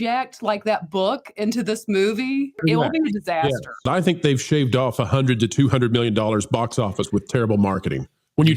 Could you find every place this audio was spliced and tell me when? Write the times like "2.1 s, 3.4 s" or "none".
2.6 s, 3.9 s